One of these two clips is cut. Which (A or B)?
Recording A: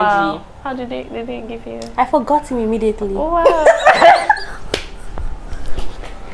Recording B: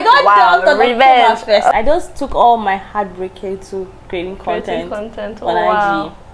B